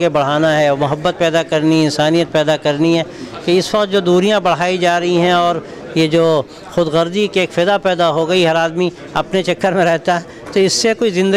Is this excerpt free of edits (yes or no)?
yes